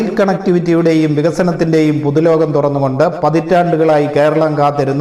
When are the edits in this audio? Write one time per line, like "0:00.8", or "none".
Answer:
none